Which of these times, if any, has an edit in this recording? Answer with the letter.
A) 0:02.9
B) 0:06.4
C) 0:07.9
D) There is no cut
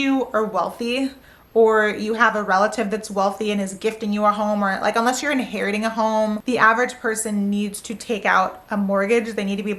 B